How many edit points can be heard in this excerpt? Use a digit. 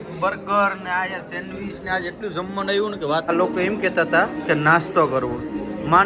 1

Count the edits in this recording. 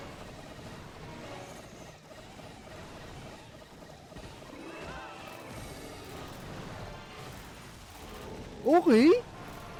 0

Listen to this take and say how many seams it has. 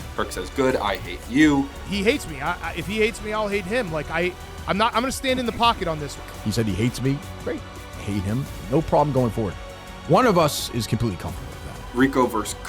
1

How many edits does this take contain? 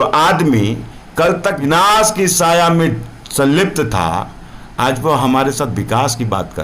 1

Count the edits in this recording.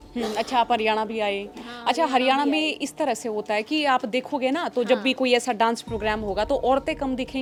0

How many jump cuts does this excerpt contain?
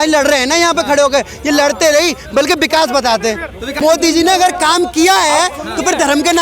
1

